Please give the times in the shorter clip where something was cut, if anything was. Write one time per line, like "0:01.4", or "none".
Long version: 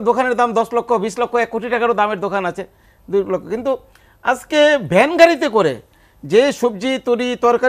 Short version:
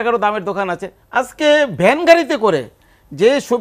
0:00.9

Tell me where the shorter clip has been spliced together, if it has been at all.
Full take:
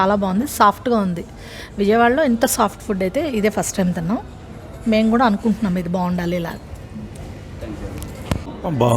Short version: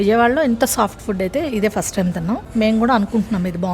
0:02.4

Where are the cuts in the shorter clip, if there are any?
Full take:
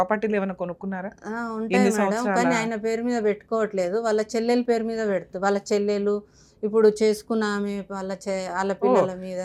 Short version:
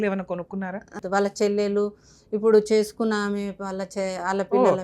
0:01.0

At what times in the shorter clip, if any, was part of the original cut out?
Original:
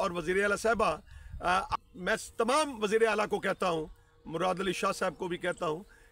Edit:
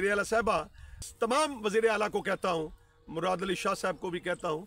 0:01.1

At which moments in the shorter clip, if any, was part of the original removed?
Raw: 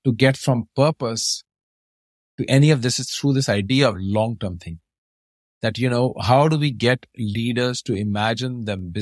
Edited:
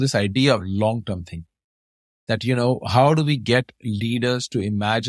none

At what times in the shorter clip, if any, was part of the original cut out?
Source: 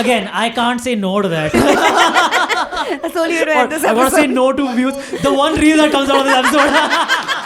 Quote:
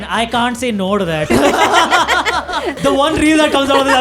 0:02.7

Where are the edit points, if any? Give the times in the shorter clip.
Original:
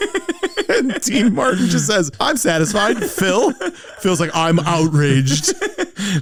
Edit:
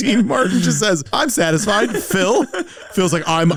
none

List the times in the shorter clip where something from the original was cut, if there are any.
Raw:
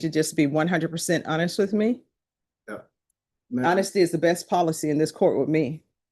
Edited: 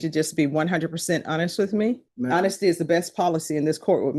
0:02.1

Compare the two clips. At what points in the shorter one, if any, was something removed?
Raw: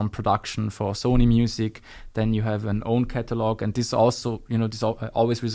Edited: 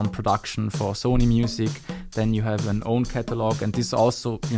none

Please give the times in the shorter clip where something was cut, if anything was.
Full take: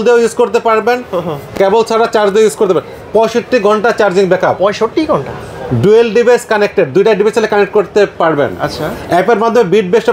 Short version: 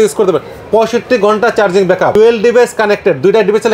0:02.1

